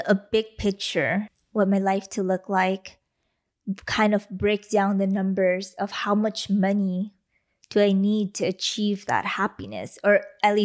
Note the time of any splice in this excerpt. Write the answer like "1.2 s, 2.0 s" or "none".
1.4 s